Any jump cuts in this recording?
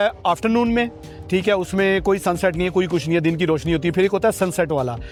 no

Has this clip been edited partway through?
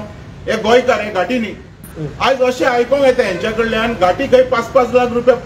no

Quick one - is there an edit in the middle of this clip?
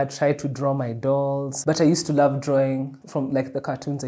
yes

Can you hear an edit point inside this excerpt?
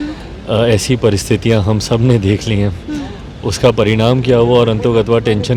no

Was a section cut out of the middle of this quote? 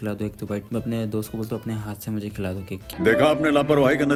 no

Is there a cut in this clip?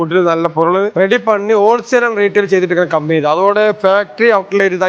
no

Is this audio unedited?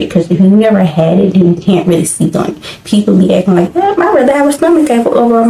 yes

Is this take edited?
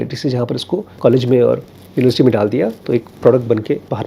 yes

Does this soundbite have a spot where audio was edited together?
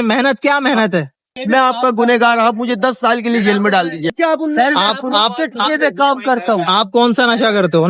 yes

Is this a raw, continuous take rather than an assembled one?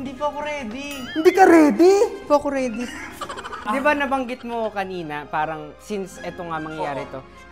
no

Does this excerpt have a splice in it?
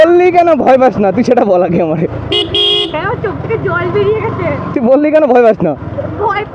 no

